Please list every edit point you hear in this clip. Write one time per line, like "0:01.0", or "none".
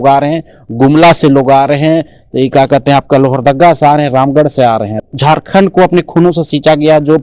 0:05.0